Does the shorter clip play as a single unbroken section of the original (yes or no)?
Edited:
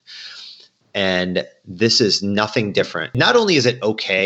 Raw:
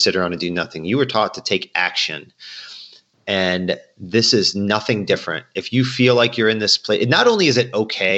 no